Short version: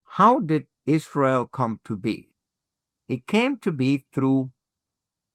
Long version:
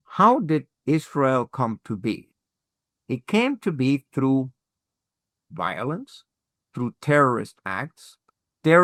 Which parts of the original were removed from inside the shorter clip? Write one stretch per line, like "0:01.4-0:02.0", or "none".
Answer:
none